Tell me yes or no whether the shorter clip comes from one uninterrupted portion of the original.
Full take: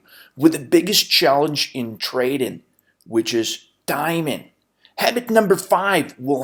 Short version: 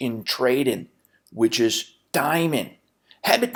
yes